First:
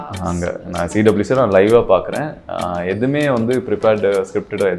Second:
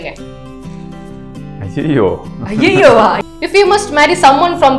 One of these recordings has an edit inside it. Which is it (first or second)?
second